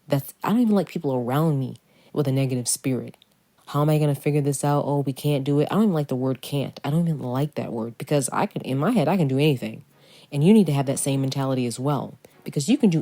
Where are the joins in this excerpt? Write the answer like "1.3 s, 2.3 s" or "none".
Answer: 3.4 s